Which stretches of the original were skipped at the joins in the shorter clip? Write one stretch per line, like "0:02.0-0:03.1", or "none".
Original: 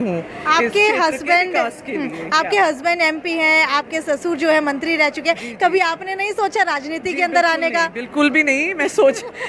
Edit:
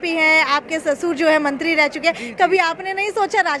none